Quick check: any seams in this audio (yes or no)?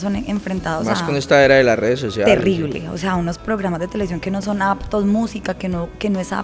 no